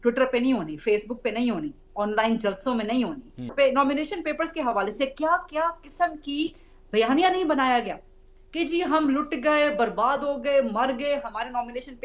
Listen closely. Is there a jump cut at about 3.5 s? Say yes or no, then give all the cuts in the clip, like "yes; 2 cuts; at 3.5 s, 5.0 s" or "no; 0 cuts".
yes; 1 cut; at 3.5 s